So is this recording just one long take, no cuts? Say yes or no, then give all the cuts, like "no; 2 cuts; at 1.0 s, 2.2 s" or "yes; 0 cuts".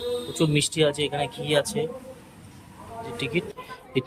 no; 1 cut; at 3.1 s